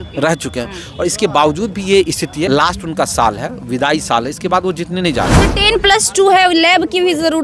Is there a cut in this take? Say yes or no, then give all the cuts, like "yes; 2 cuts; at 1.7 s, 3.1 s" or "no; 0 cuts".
yes; 2 cuts; at 2.5 s, 5.4 s